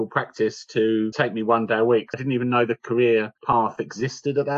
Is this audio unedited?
no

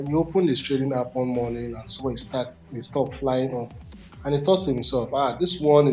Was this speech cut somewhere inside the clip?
no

